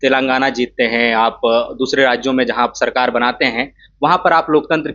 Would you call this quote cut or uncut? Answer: uncut